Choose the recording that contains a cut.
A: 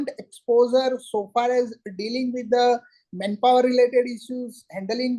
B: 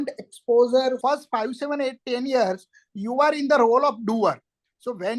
B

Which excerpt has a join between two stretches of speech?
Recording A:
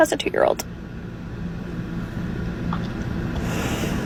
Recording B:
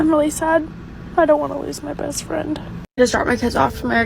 B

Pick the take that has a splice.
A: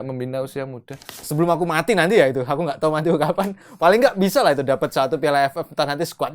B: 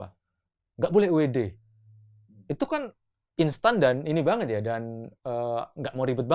A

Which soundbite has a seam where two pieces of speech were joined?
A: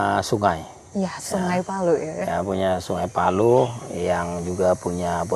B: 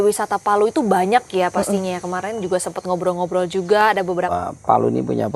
B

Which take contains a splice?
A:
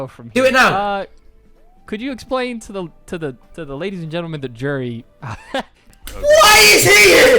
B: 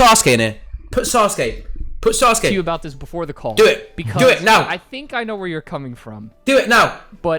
A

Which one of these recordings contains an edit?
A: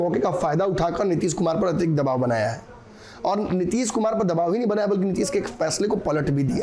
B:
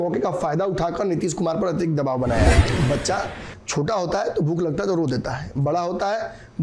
B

